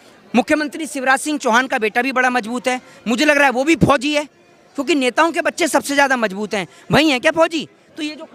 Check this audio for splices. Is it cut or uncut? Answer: uncut